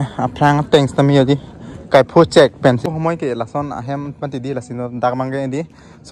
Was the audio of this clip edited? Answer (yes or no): yes